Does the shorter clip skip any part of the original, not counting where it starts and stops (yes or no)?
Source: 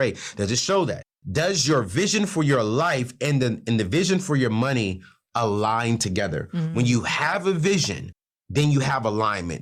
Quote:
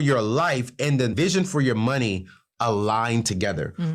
yes